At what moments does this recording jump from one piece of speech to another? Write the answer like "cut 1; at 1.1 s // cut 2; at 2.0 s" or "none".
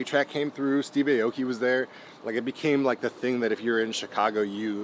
none